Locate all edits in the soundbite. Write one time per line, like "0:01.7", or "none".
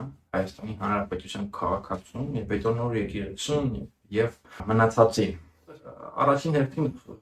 0:04.6
0:06.0